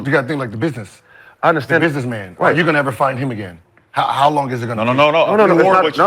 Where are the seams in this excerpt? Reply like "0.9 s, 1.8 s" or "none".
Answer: none

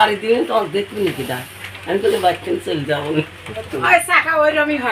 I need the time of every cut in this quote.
3.7 s

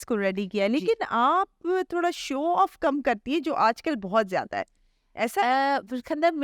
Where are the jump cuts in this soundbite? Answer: none

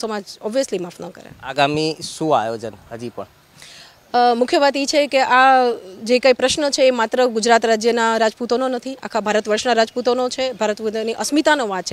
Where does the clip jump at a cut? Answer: none

